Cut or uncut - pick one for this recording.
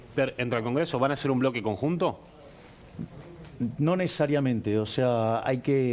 uncut